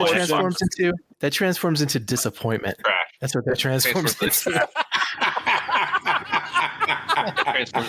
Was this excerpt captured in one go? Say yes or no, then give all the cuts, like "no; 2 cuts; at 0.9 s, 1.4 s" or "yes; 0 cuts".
yes; 0 cuts